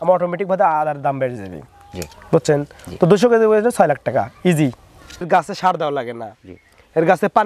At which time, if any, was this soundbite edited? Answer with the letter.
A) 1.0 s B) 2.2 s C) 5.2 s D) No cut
C